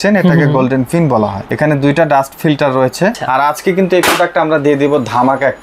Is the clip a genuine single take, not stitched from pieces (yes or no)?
no